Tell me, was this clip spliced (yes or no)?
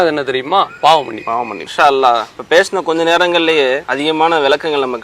yes